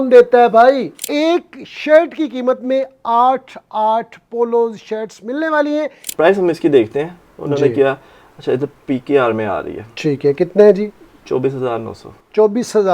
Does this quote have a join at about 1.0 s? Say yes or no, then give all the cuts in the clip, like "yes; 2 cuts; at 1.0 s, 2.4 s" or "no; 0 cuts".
yes; 2 cuts; at 1.0 s, 6.0 s